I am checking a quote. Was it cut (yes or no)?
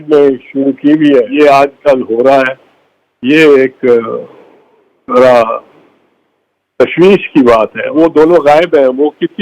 yes